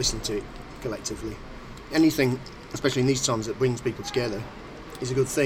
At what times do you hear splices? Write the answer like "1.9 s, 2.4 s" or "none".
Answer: 1.9 s